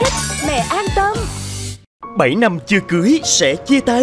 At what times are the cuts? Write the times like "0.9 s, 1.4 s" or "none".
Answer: 2.0 s